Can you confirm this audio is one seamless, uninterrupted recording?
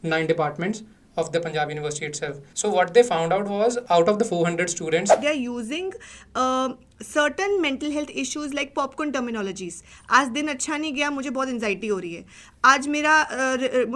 no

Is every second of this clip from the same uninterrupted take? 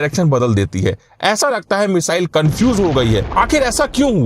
no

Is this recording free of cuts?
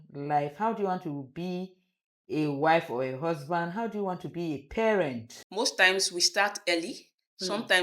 no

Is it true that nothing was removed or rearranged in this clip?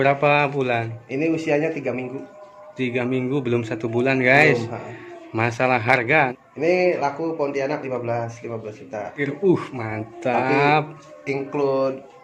yes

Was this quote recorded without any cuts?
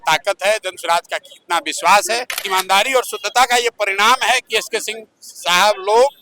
no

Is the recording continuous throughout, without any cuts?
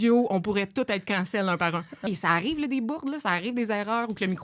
no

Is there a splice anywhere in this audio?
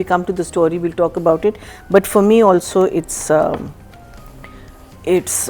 no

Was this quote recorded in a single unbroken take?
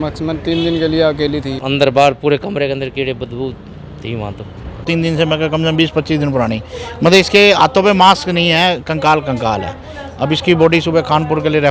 no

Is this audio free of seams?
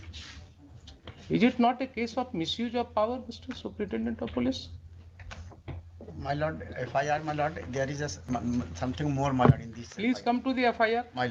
yes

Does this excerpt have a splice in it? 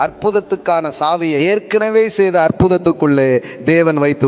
yes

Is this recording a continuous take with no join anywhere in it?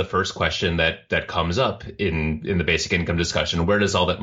yes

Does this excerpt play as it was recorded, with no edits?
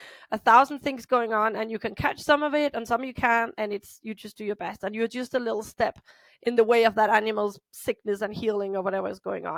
yes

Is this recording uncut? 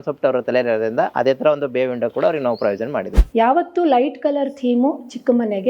no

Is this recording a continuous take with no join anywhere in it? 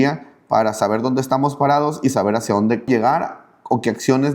no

